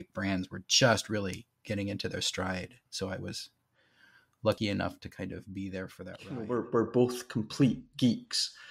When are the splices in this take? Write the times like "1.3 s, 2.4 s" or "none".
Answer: 6.4 s